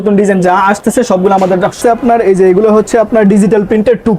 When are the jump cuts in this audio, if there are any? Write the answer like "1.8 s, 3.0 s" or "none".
1.8 s